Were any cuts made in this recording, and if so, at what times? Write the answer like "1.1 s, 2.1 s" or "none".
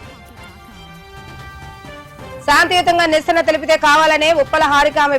2.4 s